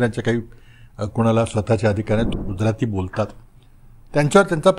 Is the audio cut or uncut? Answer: cut